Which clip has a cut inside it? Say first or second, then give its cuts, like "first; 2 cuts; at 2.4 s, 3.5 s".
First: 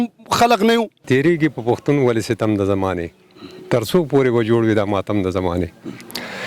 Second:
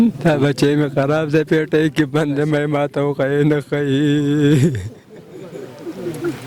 first; 1 cut; at 1.0 s